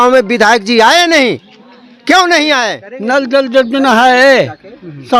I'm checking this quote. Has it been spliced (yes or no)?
yes